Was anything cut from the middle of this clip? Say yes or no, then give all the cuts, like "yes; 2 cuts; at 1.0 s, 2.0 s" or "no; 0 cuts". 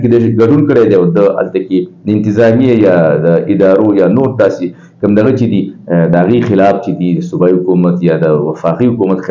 no; 0 cuts